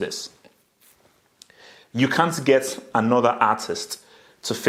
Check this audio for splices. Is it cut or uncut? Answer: uncut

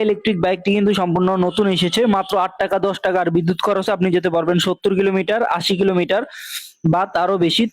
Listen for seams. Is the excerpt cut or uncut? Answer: cut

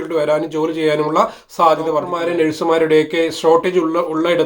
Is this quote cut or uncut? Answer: cut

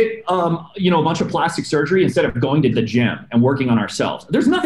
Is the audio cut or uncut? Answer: cut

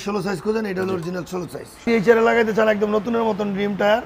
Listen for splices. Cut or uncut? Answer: cut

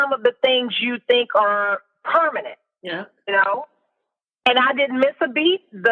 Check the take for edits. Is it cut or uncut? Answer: uncut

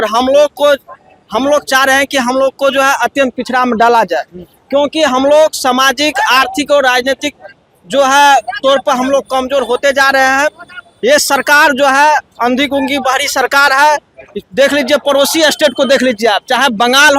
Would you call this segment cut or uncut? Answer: uncut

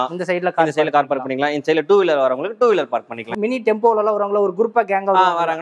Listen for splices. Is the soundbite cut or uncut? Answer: cut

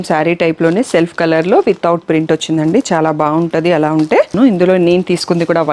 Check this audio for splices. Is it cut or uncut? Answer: cut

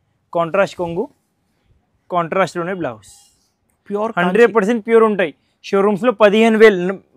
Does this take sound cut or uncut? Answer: uncut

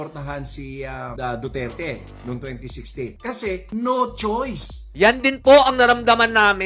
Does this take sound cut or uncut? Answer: uncut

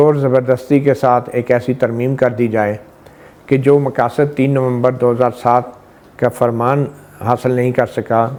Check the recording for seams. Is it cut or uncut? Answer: uncut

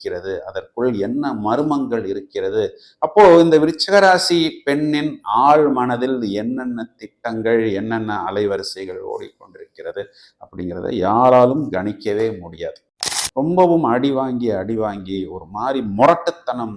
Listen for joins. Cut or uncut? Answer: cut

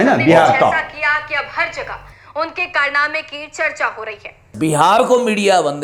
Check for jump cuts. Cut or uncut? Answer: cut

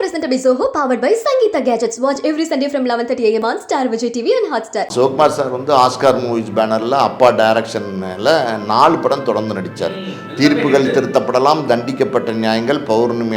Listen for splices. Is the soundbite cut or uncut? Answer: cut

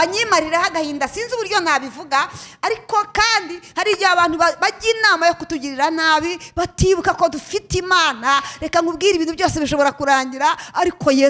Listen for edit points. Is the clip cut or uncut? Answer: uncut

